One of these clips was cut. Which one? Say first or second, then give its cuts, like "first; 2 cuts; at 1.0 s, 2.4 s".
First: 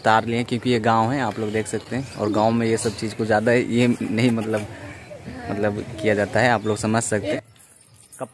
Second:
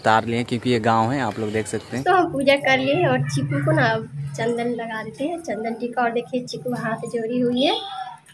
second; 1 cut; at 1.8 s